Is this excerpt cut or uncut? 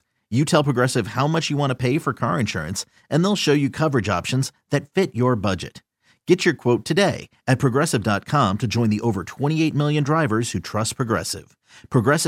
uncut